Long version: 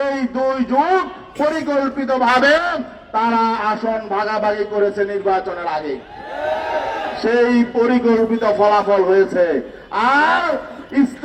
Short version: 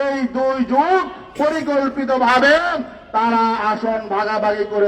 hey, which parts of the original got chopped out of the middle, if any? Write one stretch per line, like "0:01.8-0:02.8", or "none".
none